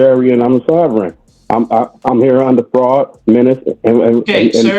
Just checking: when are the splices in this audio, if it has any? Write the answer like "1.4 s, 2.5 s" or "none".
none